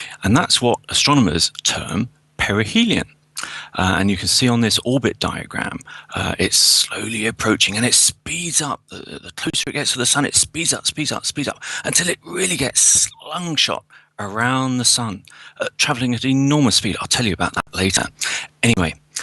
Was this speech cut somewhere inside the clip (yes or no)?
yes